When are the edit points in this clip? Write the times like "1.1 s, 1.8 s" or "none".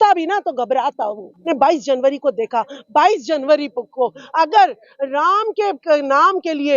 1.4 s